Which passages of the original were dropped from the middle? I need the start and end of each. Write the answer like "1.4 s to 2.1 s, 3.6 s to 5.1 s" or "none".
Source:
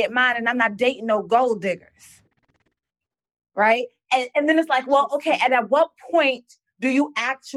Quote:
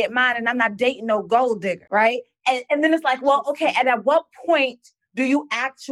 1.8 s to 3.5 s